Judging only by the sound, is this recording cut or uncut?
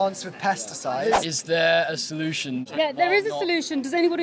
cut